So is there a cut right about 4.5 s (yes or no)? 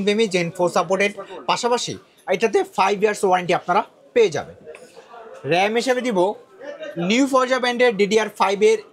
no